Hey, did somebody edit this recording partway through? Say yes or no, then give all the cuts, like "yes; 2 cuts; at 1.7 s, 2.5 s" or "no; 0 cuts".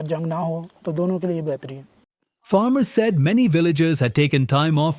no; 0 cuts